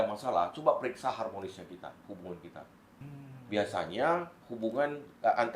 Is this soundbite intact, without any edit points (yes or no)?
no